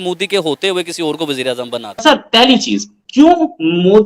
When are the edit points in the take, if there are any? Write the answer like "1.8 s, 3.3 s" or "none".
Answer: 1.8 s